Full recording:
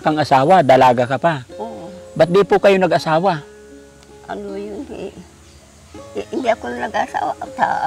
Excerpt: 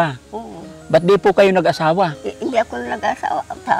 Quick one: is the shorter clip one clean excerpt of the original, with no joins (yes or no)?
no